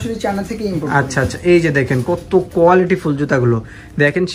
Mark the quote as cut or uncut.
uncut